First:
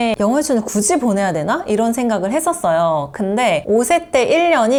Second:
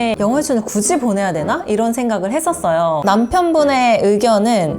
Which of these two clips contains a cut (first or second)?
second